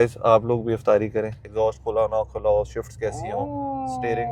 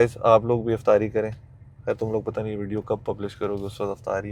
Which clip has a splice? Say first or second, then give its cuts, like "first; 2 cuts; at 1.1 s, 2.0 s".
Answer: first; 1 cut; at 1.4 s